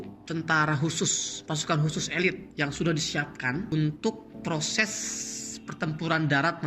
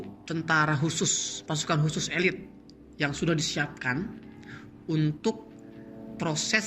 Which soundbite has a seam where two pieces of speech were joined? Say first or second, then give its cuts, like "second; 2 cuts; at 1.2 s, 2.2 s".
first; 3 cuts; at 2.4 s, 3.7 s, 4.3 s